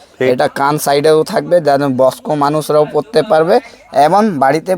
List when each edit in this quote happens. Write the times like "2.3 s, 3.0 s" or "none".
none